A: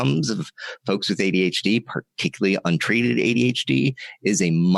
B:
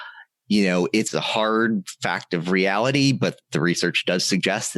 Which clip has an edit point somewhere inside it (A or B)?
B